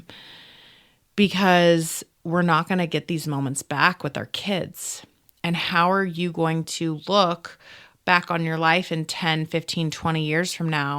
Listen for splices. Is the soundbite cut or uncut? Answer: uncut